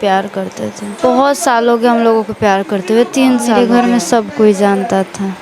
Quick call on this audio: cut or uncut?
cut